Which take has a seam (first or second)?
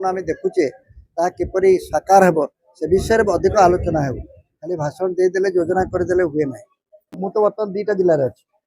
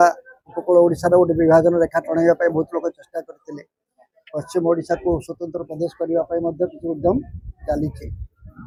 first